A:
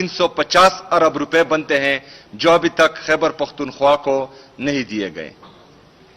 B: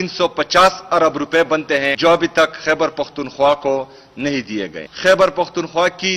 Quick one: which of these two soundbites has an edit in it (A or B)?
B